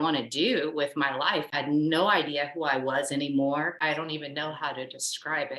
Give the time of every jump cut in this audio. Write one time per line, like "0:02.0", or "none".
0:01.5
0:03.8